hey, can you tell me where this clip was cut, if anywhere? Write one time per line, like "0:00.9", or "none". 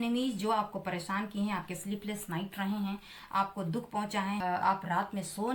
0:04.4